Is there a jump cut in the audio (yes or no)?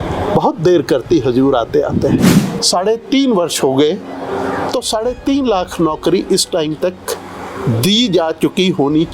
yes